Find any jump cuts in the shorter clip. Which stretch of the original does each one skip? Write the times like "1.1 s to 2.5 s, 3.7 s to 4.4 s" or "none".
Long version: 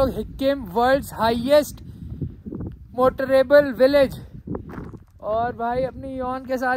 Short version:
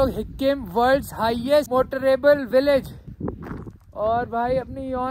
1.7 s to 2.9 s